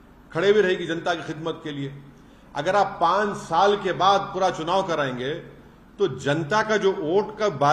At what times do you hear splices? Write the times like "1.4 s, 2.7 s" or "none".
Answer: none